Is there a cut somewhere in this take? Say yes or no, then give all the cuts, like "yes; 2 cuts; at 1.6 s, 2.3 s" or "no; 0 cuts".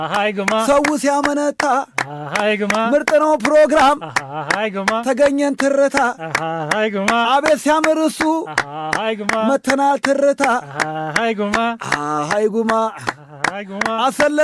no; 0 cuts